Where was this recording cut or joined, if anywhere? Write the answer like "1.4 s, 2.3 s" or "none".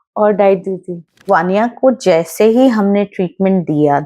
1.1 s